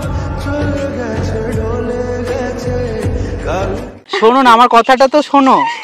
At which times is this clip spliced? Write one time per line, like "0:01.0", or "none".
none